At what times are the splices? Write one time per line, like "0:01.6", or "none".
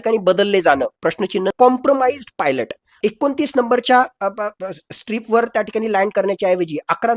0:01.5
0:03.0